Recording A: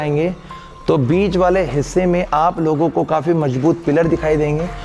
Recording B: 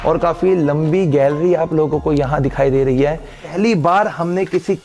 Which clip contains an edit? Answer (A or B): B